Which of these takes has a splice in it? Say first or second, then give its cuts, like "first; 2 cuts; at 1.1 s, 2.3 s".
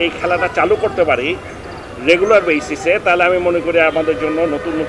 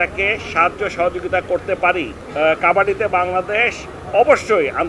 second; 1 cut; at 2.2 s